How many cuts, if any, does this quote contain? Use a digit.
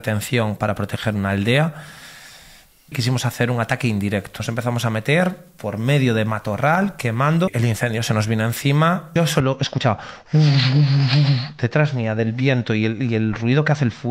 4